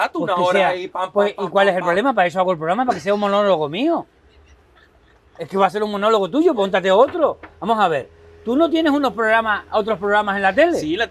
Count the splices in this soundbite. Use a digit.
0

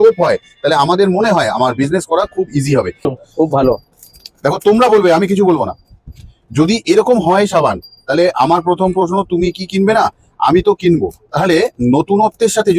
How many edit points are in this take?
1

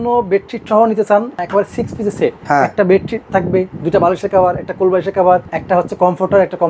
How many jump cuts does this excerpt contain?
4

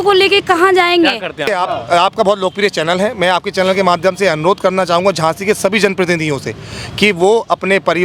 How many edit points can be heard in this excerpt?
1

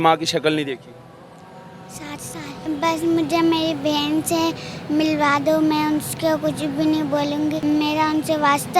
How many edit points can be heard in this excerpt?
2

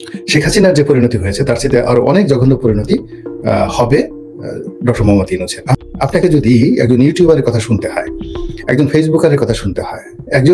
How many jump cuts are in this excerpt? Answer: 1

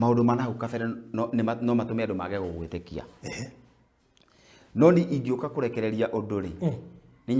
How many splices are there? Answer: 0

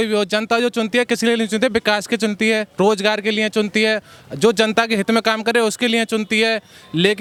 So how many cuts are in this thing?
0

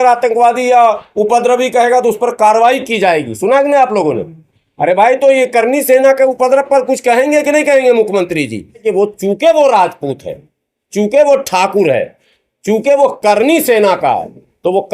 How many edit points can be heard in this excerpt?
1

